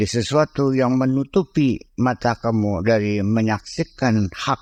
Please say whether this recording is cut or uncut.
uncut